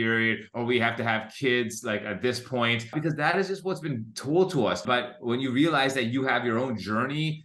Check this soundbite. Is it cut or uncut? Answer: cut